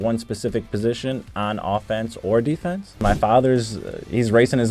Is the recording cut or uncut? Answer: cut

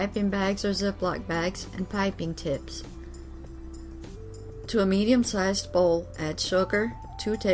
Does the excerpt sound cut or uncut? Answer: cut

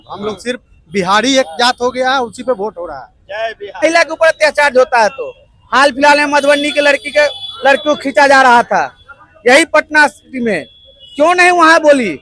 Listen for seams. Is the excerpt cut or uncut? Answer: cut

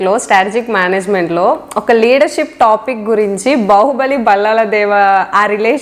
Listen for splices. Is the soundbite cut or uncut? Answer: uncut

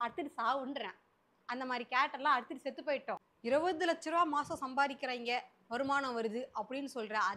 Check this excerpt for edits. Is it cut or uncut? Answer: cut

